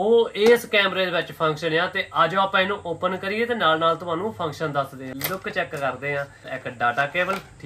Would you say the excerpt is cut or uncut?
cut